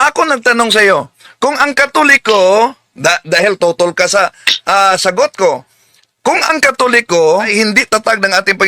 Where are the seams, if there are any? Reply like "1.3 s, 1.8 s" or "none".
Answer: 7.5 s